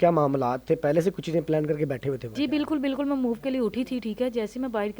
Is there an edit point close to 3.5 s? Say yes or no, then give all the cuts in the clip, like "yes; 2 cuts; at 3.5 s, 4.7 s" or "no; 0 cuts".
no; 1 cut; at 2.3 s